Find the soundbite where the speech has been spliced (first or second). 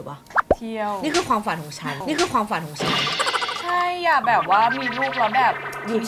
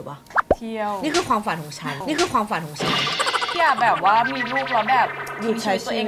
second